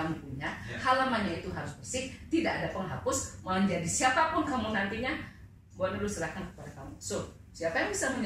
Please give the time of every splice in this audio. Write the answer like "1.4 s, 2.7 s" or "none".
none